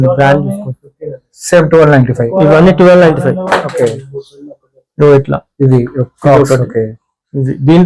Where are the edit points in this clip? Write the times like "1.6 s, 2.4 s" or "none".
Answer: none

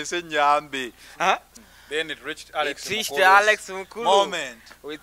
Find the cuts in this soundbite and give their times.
1.5 s

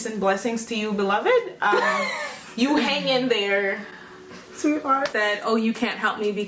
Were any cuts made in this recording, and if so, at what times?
5.1 s

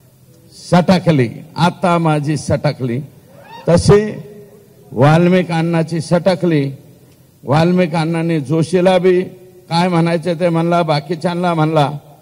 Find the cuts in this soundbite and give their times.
none

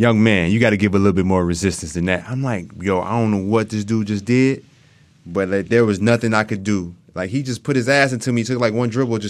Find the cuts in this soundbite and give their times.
none

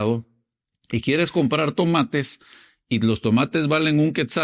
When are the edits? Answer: none

